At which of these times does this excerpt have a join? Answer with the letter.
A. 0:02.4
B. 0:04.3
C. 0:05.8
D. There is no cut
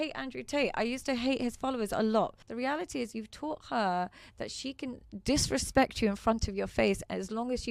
A